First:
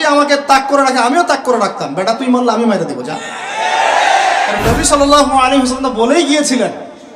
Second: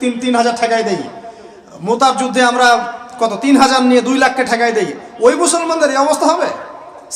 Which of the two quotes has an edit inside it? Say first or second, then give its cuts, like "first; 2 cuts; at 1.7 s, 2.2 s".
first; 1 cut; at 4.6 s